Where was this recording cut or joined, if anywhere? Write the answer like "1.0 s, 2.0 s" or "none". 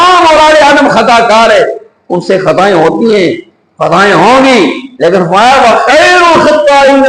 none

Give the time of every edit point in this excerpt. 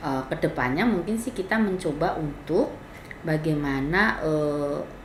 none

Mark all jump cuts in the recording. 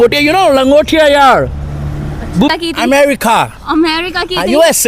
2.5 s

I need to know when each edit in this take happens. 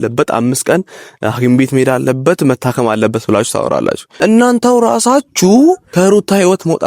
4.0 s, 5.9 s

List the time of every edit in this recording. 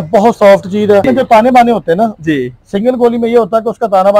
1.0 s

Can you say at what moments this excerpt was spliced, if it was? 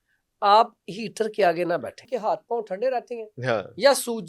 2.0 s

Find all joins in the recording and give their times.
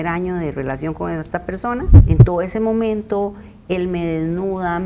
2.0 s

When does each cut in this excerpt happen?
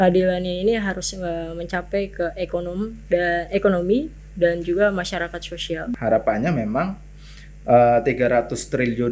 5.9 s

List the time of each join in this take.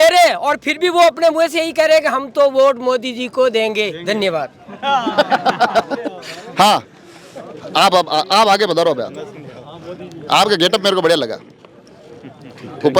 none

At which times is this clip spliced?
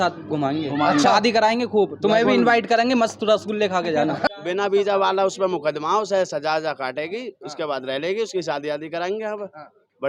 4.3 s

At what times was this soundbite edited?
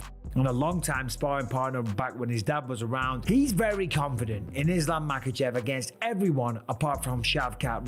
none

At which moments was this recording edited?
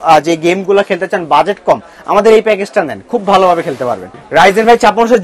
4.1 s

